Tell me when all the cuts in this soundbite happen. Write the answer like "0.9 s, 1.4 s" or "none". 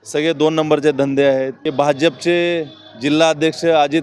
1.6 s